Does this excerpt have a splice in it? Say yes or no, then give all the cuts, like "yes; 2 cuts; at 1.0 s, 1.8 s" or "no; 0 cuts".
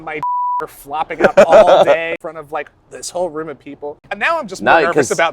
yes; 2 cuts; at 2.2 s, 4.1 s